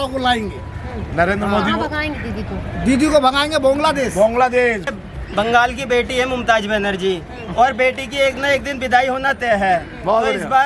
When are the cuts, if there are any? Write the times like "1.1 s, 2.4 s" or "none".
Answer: 4.9 s

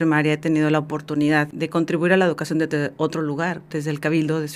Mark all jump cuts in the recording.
1.5 s, 3.7 s

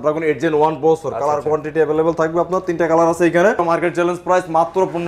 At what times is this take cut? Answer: 3.6 s

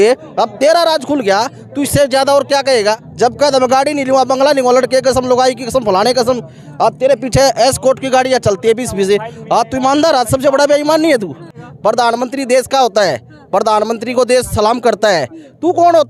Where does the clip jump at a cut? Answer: 3.1 s, 11.6 s

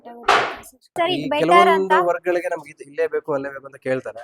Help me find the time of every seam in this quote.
1.0 s

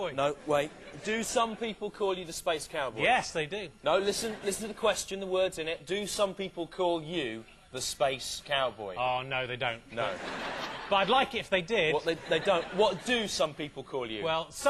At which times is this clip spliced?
5.8 s

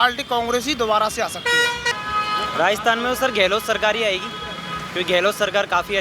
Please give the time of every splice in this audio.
1.9 s

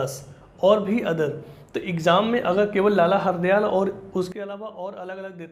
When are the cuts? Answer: none

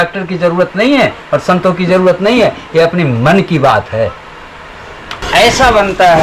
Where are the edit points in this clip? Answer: 5.2 s

